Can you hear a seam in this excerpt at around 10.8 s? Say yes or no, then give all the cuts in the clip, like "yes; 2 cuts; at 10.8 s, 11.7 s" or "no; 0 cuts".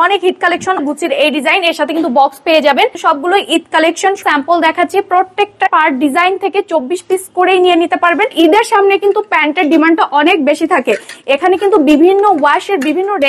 no; 5 cuts; at 0.8 s, 3.0 s, 4.2 s, 5.7 s, 8.3 s